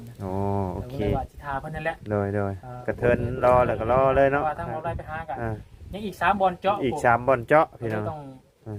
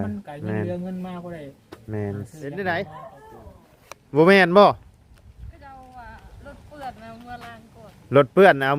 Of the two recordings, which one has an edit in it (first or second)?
second